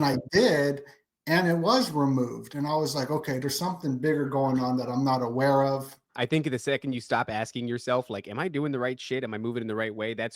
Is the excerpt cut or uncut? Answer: cut